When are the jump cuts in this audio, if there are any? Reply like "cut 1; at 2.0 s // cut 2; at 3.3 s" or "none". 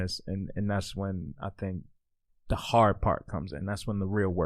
none